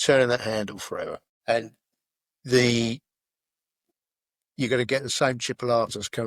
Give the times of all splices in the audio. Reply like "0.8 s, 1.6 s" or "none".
1.3 s